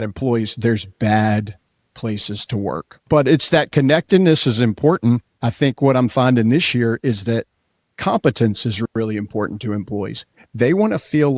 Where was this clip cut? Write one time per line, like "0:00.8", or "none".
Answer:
0:02.9
0:05.5